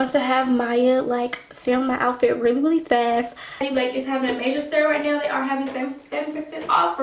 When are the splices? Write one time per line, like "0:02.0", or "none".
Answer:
0:03.4